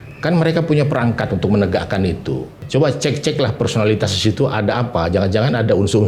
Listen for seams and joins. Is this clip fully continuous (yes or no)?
no